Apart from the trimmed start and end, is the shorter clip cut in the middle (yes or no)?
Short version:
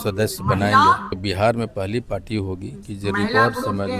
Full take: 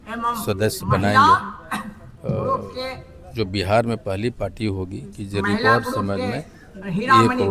yes